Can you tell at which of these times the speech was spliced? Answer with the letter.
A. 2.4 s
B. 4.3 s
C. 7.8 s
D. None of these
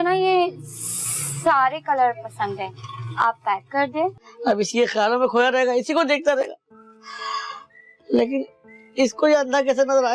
B